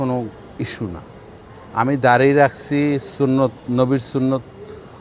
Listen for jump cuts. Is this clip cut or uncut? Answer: uncut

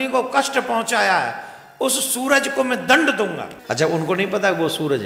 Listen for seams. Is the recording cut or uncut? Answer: cut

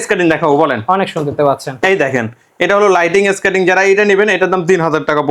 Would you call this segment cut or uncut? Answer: uncut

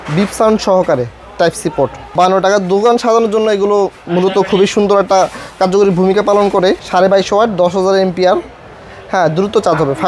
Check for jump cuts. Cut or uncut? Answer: cut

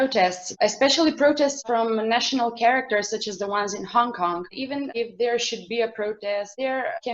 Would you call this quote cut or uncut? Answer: cut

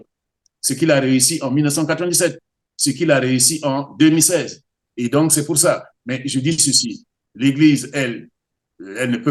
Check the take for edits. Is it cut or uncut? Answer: cut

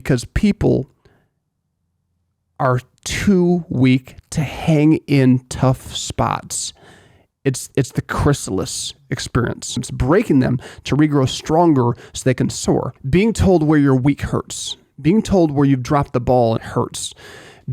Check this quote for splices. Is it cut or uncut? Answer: cut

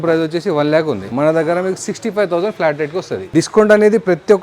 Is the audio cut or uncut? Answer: cut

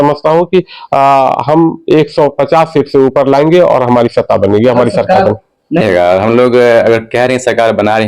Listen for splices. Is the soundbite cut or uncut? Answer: cut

